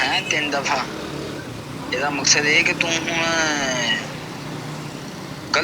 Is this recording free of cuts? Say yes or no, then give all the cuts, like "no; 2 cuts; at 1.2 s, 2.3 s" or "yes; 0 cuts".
yes; 0 cuts